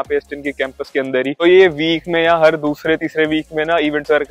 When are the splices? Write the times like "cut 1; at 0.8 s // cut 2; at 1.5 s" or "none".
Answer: cut 1; at 1.4 s